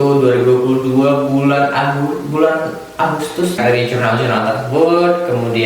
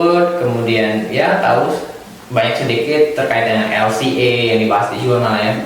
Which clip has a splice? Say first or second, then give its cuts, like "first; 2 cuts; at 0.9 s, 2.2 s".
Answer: first; 1 cut; at 3.6 s